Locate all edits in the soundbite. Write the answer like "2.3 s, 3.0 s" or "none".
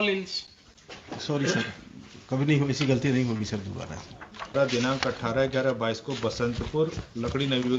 4.5 s

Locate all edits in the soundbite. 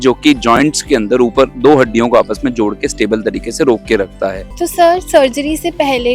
4.4 s

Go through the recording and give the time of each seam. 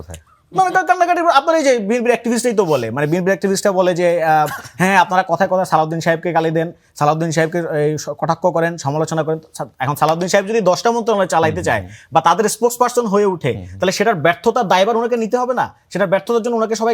none

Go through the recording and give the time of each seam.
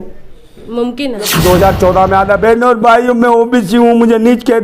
1.3 s

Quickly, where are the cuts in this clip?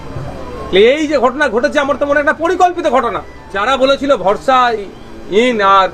3.6 s

